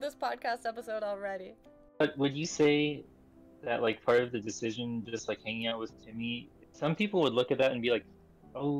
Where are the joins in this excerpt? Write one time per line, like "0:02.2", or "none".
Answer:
0:02.0
0:06.5